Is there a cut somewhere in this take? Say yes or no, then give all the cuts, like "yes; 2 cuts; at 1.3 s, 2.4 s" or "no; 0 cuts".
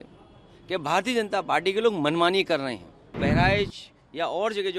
yes; 1 cut; at 3.2 s